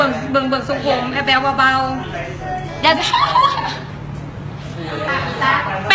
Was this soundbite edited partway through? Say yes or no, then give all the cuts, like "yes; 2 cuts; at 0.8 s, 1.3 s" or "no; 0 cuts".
yes; 1 cut; at 3.0 s